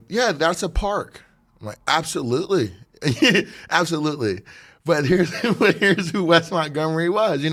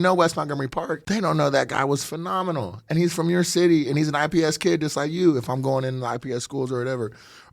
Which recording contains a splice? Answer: second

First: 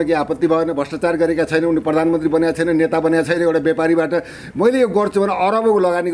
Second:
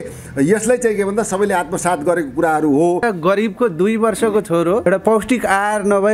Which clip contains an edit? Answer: second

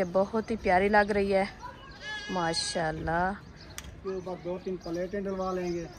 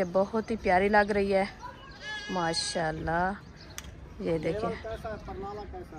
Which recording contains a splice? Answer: first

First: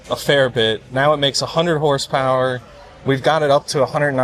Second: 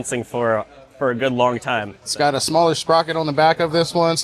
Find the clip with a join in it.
second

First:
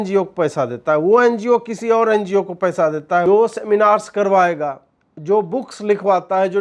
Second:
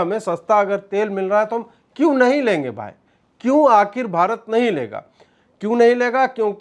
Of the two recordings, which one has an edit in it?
first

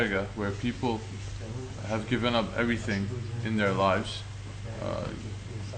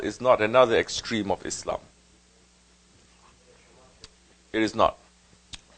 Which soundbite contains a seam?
first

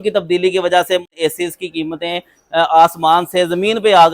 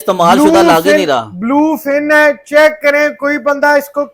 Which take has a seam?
first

